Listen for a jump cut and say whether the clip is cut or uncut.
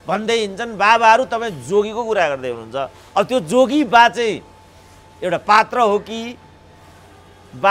uncut